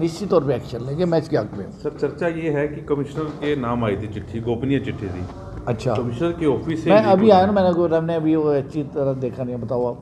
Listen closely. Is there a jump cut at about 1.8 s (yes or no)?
no